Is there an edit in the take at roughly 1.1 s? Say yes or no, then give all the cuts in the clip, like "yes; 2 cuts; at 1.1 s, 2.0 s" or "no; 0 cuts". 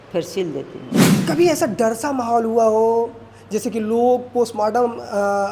yes; 1 cut; at 1.1 s